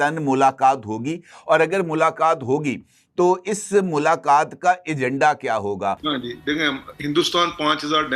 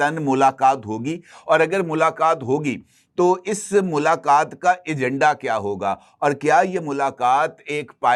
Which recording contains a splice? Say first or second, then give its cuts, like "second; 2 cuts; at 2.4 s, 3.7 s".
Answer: first; 1 cut; at 6.1 s